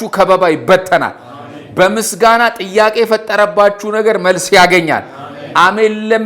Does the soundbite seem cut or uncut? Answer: uncut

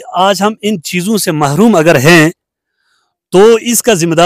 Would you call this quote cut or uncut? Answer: uncut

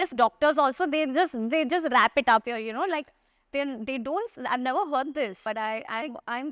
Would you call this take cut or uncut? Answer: uncut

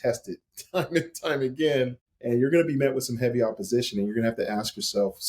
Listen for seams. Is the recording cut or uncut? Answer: cut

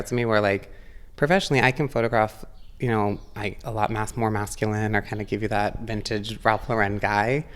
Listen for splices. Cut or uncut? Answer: uncut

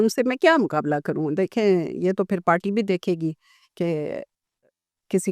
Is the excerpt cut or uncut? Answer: uncut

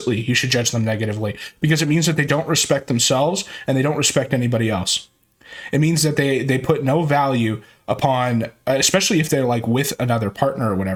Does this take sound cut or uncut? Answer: uncut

